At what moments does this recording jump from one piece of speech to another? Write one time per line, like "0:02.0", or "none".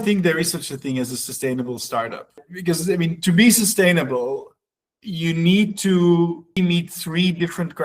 0:02.5
0:06.6